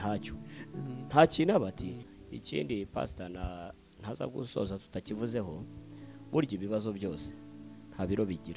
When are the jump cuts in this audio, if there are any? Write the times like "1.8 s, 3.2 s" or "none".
2.0 s